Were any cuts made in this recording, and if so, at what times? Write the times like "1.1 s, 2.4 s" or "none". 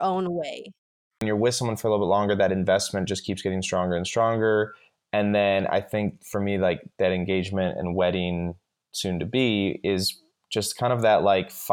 1.2 s